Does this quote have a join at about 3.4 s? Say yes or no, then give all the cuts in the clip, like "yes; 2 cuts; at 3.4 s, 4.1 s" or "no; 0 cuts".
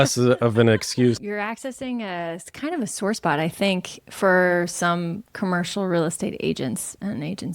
no; 1 cut; at 1.2 s